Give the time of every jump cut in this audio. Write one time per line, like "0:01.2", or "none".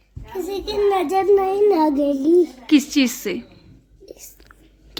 none